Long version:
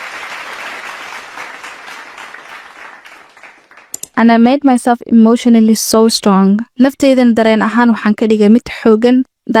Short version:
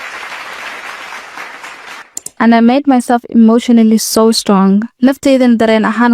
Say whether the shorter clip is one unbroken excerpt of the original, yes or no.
no